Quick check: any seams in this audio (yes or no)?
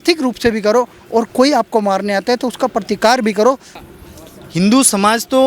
yes